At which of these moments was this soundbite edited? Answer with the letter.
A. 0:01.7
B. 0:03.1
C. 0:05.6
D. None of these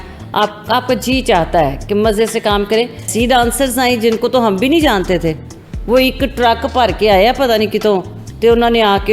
B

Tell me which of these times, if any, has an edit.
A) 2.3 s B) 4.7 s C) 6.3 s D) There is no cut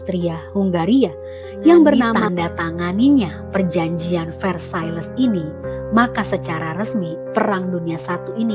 A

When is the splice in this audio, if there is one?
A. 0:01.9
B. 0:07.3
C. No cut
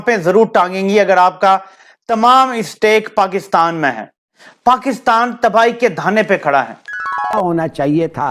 B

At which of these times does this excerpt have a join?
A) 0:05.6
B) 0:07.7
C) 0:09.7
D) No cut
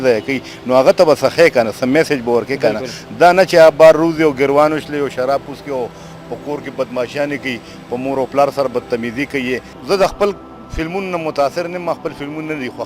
C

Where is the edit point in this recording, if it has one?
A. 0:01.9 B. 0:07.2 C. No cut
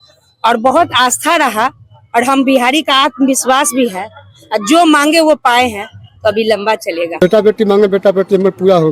B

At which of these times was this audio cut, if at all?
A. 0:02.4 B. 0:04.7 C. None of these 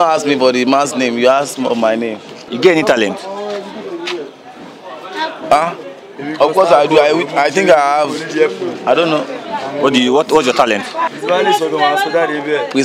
A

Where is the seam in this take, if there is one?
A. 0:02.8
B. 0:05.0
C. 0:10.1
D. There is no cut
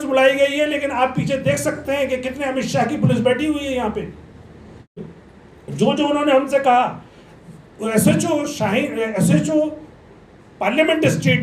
B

